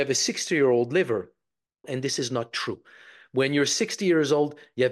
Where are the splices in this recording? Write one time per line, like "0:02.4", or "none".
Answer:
0:01.9